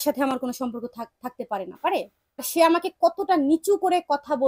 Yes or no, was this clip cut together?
yes